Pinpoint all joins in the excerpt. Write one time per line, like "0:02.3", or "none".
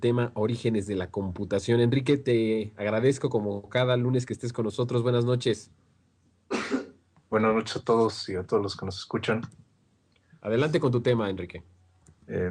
0:04.3